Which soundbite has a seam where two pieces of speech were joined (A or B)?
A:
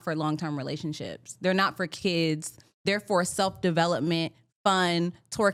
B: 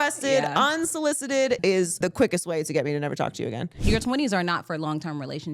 B